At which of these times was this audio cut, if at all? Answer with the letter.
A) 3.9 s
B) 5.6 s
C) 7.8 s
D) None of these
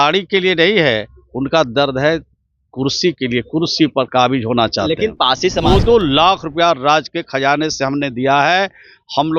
B